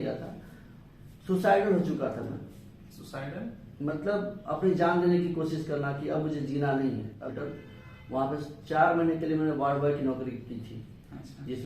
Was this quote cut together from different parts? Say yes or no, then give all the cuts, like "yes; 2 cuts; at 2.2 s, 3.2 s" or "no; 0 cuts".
yes; 1 cut; at 7.2 s